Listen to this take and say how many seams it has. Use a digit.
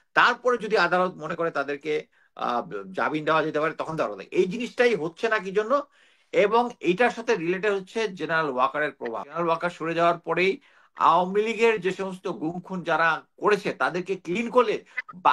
1